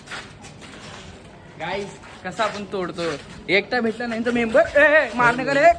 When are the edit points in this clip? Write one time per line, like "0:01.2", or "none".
none